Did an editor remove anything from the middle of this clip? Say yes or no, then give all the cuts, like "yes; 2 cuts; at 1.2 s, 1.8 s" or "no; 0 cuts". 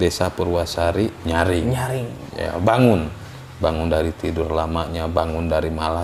no; 0 cuts